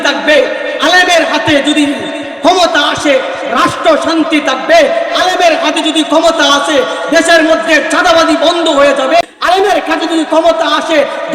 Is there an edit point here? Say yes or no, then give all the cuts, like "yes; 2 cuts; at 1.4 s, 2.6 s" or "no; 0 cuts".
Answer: yes; 1 cut; at 9.2 s